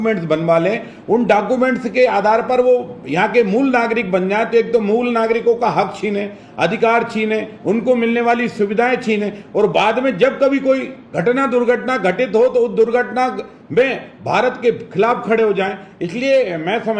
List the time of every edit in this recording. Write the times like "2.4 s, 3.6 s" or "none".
none